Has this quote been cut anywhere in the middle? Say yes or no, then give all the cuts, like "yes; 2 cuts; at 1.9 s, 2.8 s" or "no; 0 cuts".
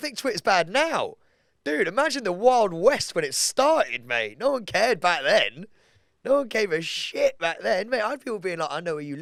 no; 0 cuts